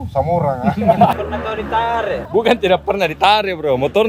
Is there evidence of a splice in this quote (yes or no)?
yes